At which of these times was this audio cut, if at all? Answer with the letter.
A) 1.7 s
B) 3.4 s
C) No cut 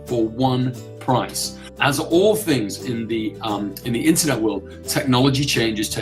A